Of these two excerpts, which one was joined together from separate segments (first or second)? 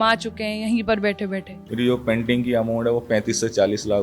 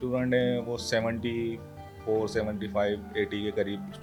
first